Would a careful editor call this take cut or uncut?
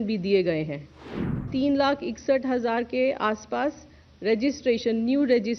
cut